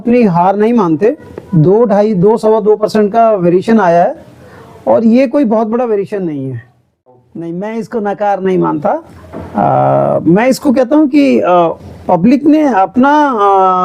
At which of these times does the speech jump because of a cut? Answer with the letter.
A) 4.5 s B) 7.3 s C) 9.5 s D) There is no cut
B